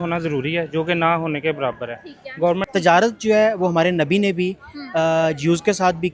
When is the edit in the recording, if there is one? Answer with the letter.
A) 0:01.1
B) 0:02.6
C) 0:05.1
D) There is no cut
B